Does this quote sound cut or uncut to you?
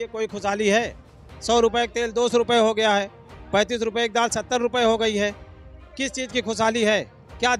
uncut